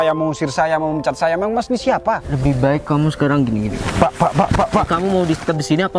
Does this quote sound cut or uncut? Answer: cut